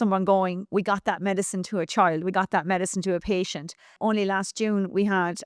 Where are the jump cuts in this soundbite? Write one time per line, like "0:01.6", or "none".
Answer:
0:03.9